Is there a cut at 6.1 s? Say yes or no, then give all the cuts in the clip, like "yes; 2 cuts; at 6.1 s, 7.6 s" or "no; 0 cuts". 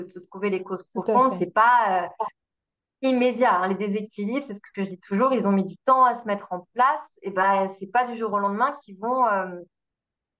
no; 0 cuts